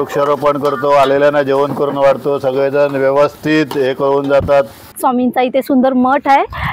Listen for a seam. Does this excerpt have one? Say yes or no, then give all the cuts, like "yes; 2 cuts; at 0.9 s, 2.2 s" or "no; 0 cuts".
yes; 1 cut; at 4.9 s